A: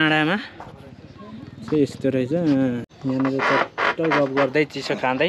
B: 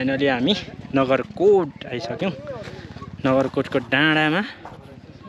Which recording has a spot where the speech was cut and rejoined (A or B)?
A